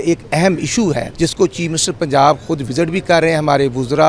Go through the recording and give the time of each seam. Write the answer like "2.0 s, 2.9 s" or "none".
1.1 s